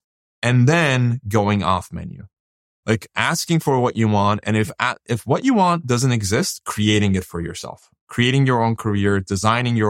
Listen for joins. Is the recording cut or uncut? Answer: uncut